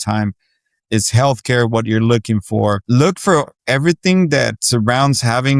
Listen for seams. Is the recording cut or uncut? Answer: cut